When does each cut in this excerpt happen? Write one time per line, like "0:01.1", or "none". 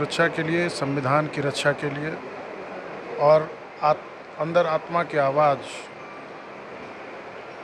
none